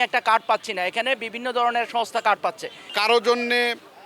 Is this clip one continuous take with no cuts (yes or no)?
no